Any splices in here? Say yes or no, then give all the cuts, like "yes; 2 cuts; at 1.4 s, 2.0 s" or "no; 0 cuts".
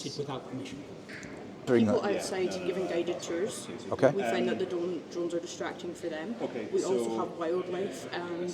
yes; 1 cut; at 1.7 s